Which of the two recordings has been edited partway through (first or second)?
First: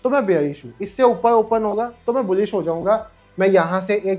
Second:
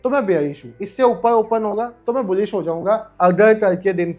second